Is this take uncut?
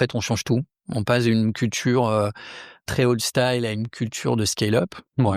no; 1 cut; at 2.9 s

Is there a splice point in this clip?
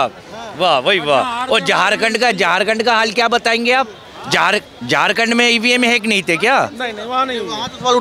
no; 0 cuts

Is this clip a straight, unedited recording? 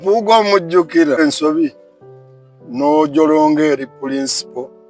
no; 1 cut; at 1.2 s

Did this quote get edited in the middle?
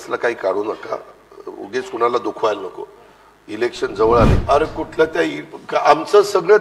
yes; 1 cut; at 4.4 s

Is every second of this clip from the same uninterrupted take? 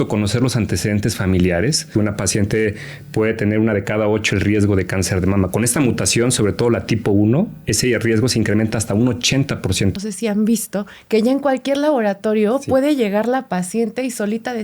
no; 2 cuts; at 1.9 s, 10.0 s

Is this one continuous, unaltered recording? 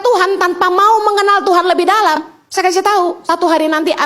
no; 2 cuts; at 2.2 s, 3.2 s

